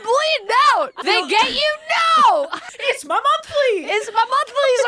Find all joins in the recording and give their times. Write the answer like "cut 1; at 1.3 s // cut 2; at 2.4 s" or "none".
cut 1; at 1.0 s // cut 2; at 2.7 s